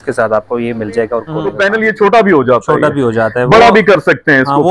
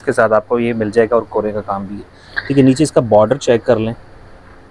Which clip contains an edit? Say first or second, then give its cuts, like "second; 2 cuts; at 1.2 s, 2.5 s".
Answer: first; 1 cut; at 1.5 s